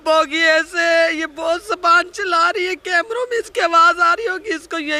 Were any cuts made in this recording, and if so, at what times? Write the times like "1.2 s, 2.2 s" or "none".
none

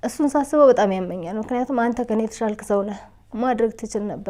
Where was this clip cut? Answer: none

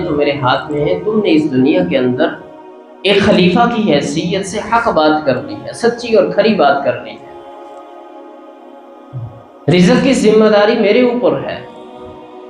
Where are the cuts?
11.6 s

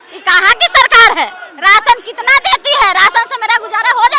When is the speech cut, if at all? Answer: 1.5 s

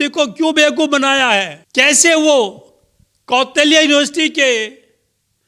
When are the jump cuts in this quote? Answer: 1.6 s

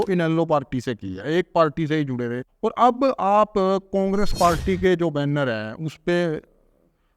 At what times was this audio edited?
2.5 s

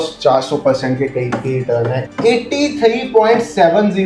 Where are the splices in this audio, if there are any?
2.0 s

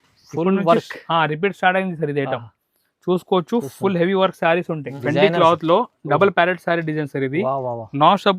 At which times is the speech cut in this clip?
4.8 s

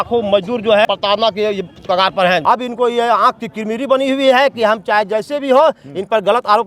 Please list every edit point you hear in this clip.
0.8 s, 2.4 s

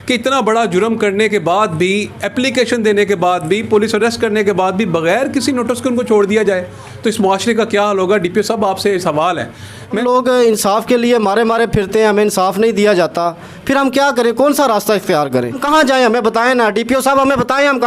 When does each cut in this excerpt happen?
10.0 s, 15.6 s

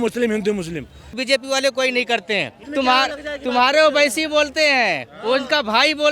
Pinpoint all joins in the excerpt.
1.2 s, 2.6 s

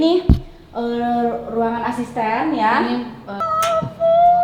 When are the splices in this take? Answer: 3.5 s

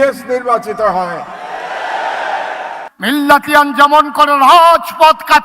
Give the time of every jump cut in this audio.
2.8 s

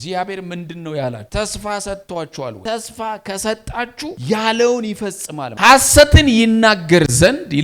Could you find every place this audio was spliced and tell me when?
1.2 s, 2.6 s, 4.2 s, 5.5 s

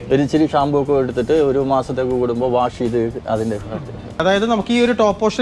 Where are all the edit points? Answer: 4.2 s

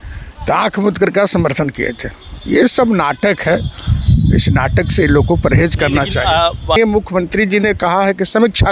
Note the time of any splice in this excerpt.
6.8 s

